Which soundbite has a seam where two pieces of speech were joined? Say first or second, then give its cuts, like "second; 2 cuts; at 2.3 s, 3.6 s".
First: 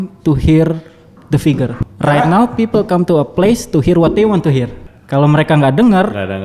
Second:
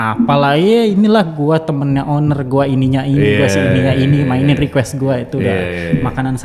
first; 2 cuts; at 1.8 s, 4.8 s